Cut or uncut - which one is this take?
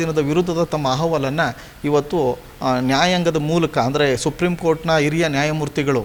uncut